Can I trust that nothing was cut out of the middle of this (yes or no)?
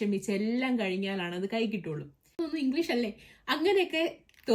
no